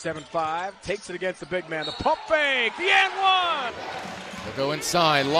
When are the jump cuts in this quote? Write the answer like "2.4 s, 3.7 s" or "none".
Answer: 3.8 s